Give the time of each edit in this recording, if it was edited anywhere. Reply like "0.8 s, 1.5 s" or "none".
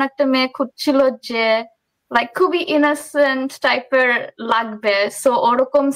none